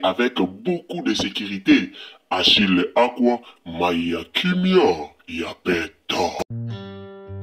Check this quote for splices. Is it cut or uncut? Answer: cut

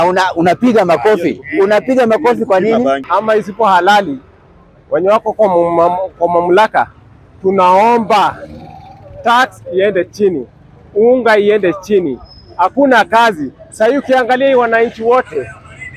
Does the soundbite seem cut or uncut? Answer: cut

